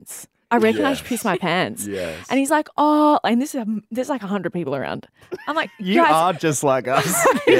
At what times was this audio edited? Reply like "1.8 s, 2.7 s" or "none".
none